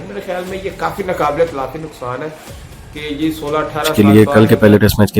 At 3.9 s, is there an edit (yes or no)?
yes